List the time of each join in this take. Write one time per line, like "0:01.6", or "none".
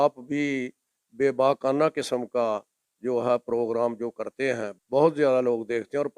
0:04.7